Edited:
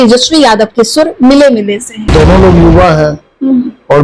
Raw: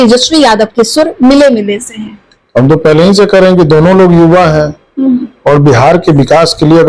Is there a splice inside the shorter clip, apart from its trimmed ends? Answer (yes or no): yes